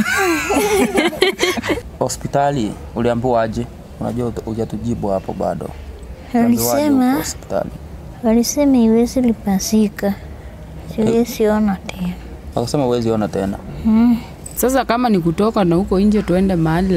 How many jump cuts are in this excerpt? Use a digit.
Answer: 2